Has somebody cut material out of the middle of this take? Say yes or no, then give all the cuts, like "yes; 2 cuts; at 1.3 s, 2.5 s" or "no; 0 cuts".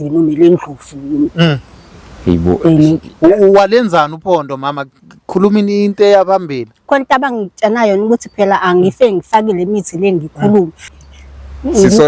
yes; 1 cut; at 10.8 s